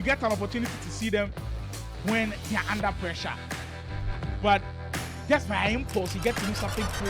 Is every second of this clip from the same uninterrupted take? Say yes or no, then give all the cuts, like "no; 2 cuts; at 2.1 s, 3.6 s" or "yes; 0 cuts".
no; 1 cut; at 2.6 s